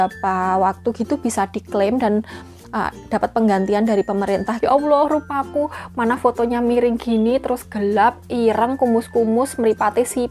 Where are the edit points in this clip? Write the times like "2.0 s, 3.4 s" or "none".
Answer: 4.5 s